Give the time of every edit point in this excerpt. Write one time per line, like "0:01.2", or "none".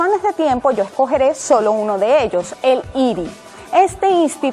0:02.1